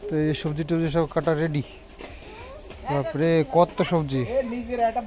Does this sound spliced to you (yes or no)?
no